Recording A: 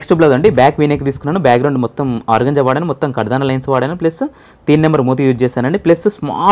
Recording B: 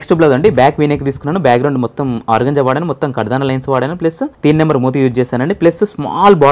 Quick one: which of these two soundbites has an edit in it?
B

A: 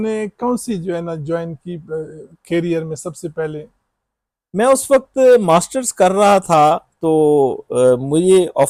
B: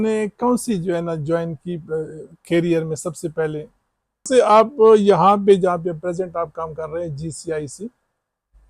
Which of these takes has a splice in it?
B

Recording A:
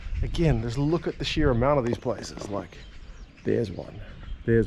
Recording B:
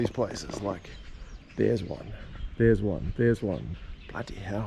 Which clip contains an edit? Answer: B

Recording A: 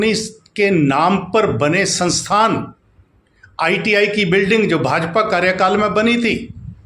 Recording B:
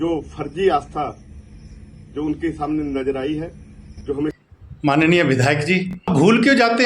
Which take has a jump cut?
B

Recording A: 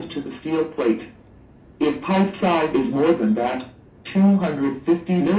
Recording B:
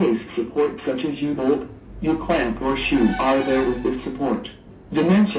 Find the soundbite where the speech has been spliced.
A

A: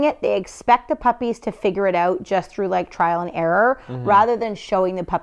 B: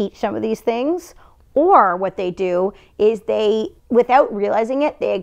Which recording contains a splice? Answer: B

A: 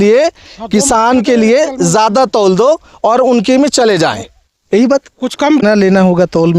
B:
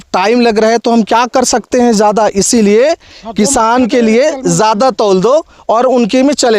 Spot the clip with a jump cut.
A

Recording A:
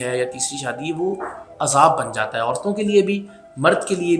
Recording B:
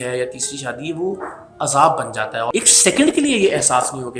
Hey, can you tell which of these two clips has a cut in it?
B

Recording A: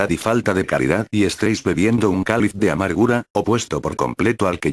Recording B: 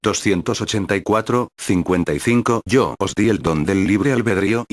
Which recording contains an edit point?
A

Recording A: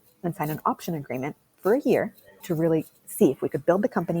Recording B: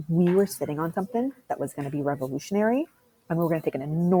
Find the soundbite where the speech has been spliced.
A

